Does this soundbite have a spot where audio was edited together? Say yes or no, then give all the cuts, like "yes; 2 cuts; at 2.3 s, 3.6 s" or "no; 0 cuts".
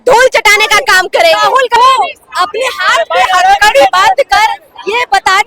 yes; 1 cut; at 1.8 s